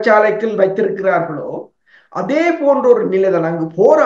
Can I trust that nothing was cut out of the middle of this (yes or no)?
yes